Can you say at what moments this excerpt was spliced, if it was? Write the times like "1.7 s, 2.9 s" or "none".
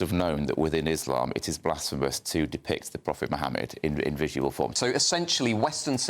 4.8 s